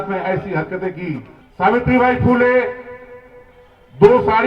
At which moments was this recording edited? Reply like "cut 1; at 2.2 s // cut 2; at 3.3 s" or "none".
cut 1; at 1.4 s